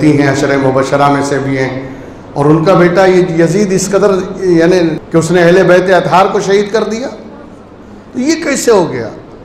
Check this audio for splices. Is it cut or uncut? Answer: cut